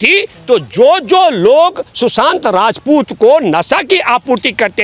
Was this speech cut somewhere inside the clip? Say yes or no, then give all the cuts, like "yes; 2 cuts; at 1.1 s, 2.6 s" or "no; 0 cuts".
no; 0 cuts